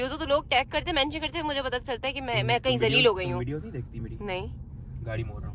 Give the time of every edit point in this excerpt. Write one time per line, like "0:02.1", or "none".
none